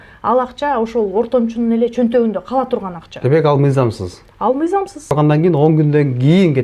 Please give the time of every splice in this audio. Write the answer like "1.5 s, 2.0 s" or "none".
5.1 s